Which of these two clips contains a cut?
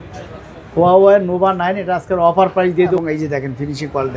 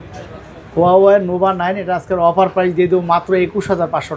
first; 1 cut; at 3.0 s

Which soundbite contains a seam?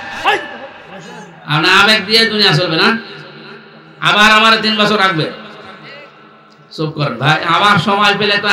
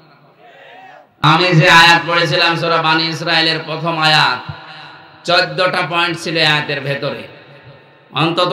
second; 1 cut; at 1.2 s

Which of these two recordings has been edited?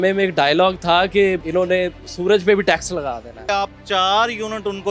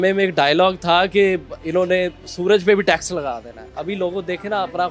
first; 2 cuts; at 1.4 s, 3.3 s

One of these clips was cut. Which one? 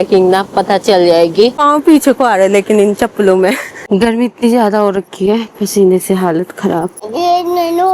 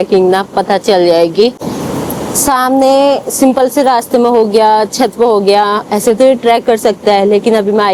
first; 3 cuts; at 1.6 s, 3.7 s, 7.0 s

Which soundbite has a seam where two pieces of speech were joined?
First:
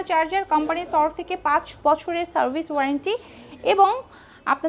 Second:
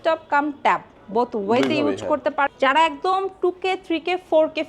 second; 1 cut; at 2.5 s

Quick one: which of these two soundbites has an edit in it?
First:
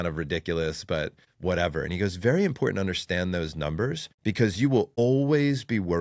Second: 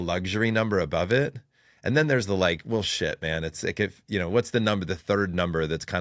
first; 3 cuts; at 1.2 s, 4.1 s, 5.0 s

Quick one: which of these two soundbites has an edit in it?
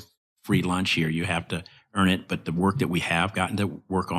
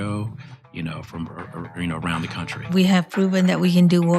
second; 1 cut; at 2.7 s

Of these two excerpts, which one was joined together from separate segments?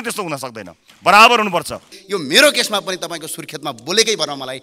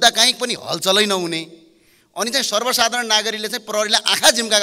first; 1 cut; at 1.9 s

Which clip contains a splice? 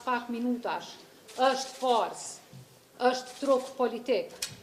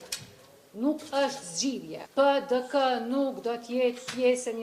second; 1 cut; at 1.9 s

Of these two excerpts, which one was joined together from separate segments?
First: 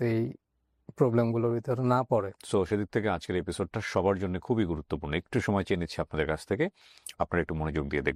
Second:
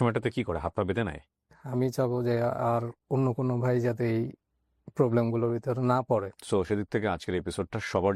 second; 1 cut; at 1.5 s

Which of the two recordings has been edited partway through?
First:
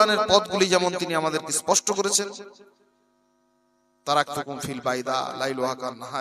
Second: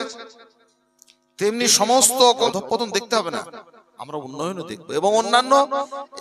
second; 1 cut; at 2.5 s

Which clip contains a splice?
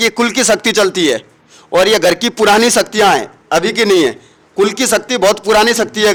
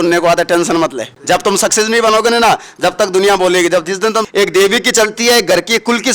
second; 2 cuts; at 1.1 s, 4.2 s

